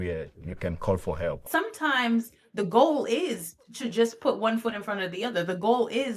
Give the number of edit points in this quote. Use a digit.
1